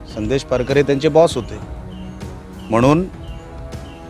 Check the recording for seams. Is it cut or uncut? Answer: uncut